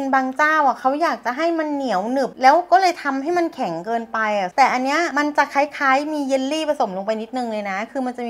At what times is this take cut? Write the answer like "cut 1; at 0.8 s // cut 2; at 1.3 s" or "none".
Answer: cut 1; at 4.5 s